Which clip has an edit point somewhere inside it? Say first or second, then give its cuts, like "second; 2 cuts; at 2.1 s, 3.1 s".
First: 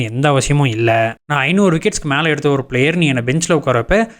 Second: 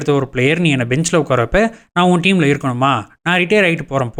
first; 1 cut; at 1.2 s